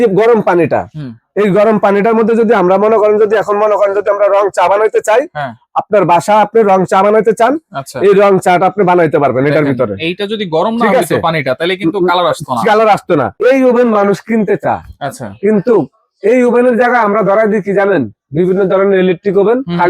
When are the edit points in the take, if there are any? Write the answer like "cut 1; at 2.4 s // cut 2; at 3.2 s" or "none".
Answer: cut 1; at 13.3 s